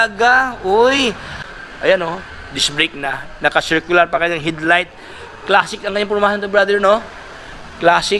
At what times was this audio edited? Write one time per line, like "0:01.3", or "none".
0:01.3